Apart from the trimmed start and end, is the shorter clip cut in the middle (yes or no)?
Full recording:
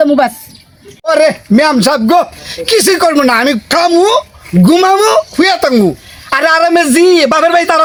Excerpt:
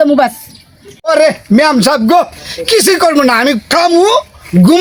no